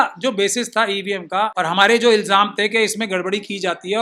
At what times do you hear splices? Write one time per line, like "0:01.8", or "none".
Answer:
0:01.5

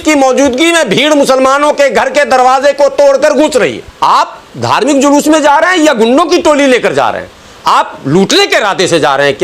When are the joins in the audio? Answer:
0:03.8

